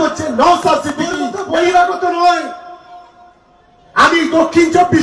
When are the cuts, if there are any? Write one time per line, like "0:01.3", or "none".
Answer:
0:01.3